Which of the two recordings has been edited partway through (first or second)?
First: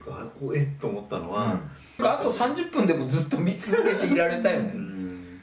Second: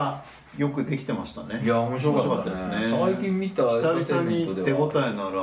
first